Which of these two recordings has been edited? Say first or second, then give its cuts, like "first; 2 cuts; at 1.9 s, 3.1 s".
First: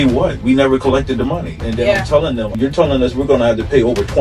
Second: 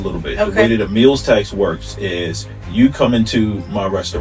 first; 2 cuts; at 1.6 s, 2.5 s